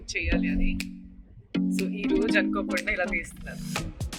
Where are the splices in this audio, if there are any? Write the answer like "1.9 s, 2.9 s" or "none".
none